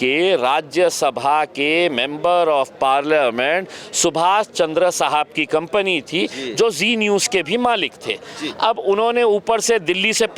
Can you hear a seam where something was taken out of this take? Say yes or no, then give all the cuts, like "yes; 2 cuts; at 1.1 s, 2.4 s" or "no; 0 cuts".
no; 0 cuts